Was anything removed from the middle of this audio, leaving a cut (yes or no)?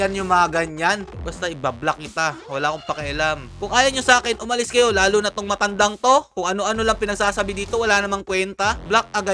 no